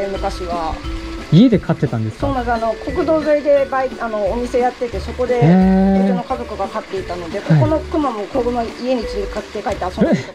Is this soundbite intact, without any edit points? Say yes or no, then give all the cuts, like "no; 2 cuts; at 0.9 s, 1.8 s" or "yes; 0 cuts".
yes; 0 cuts